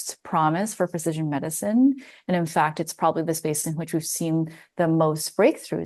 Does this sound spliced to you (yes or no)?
no